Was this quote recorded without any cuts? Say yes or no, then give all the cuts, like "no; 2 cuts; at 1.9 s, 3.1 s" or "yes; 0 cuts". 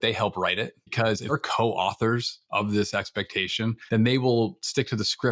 no; 2 cuts; at 1.3 s, 3.8 s